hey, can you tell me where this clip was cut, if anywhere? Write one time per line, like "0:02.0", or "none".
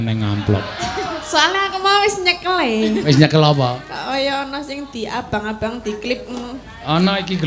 none